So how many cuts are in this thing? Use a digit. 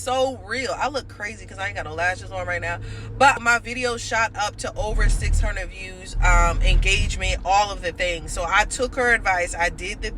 1